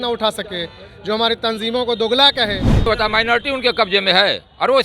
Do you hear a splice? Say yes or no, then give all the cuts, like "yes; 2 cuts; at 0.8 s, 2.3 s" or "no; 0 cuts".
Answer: yes; 1 cut; at 2.8 s